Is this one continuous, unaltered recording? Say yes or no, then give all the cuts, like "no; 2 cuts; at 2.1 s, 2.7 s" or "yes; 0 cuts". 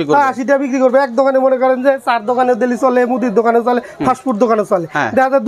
yes; 0 cuts